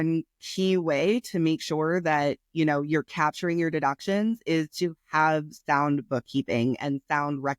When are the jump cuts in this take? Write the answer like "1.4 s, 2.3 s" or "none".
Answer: none